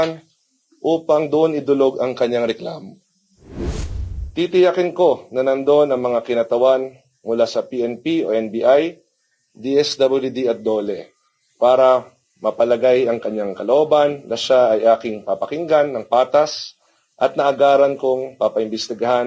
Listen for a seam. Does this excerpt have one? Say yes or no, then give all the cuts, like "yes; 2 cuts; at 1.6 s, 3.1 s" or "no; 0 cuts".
no; 0 cuts